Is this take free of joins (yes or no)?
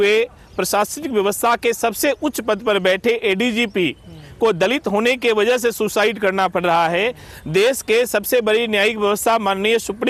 yes